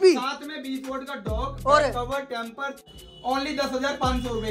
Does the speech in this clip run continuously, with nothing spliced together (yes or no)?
no